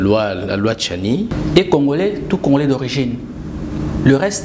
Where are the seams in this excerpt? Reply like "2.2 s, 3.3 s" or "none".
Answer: 1.3 s

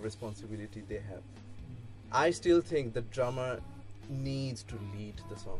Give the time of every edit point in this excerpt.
1.9 s

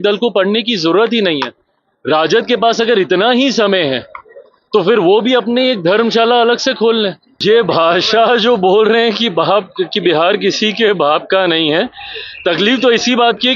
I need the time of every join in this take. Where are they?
7.3 s

